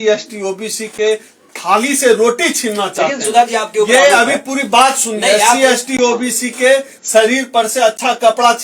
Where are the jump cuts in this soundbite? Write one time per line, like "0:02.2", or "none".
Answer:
none